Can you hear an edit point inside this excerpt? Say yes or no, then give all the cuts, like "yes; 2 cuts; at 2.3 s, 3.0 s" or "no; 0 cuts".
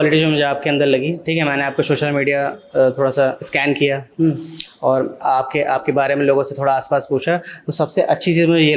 no; 0 cuts